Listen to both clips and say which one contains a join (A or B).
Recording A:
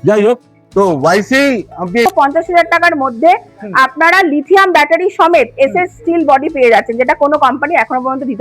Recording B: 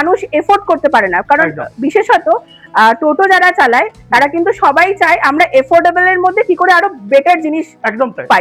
A